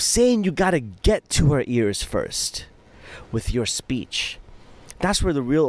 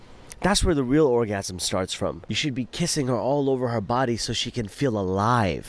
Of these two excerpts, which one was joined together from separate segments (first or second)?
second